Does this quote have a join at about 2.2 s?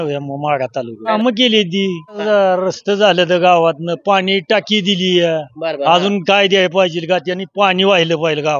yes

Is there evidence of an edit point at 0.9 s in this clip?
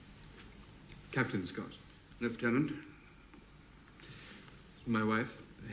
yes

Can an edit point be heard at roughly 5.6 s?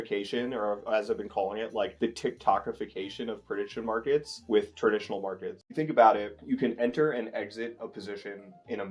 yes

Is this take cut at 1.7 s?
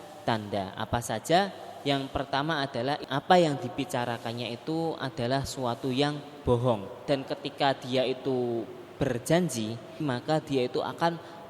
no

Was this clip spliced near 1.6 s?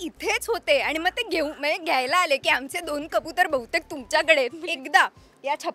no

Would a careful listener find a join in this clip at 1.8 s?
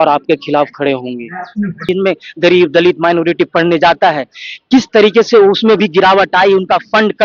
yes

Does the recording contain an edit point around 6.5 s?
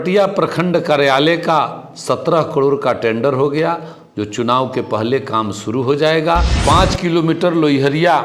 yes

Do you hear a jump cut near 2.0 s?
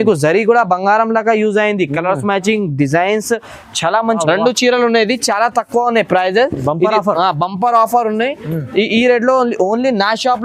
no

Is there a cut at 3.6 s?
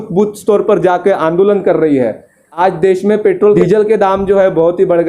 yes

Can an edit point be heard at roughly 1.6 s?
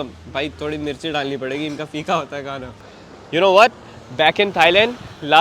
no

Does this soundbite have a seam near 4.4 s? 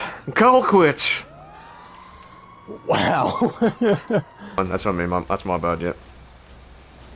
yes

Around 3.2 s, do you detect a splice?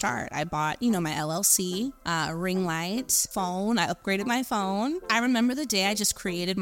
yes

